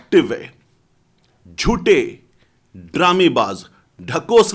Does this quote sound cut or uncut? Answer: uncut